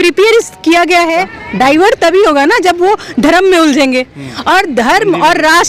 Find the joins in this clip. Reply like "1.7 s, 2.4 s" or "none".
1.4 s